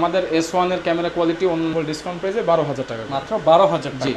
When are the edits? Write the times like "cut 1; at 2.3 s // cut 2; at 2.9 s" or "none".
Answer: cut 1; at 1.7 s